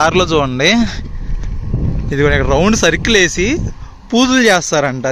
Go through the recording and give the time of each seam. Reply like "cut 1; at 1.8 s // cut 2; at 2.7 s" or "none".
none